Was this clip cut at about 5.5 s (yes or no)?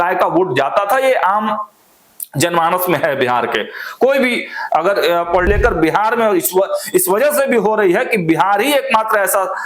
yes